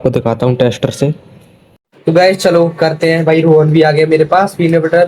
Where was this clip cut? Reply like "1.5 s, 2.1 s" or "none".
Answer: 1.9 s